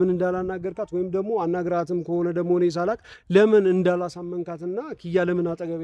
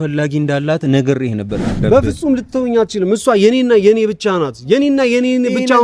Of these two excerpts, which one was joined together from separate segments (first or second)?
second